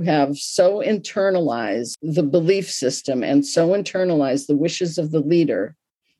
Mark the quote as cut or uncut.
cut